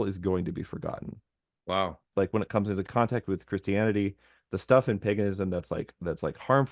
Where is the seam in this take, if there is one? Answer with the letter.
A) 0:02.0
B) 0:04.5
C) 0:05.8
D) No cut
A